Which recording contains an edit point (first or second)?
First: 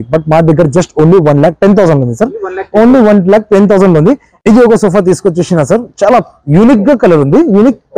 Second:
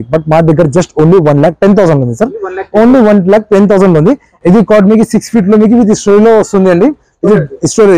second